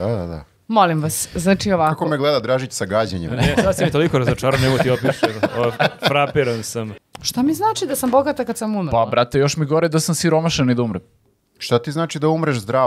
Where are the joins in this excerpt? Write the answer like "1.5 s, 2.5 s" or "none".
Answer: 6.7 s